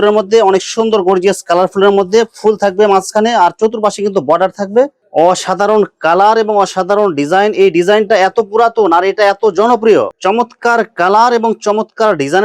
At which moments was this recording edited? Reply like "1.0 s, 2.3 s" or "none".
5.0 s, 10.1 s